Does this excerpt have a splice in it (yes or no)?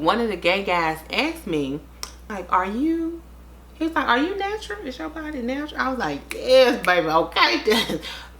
no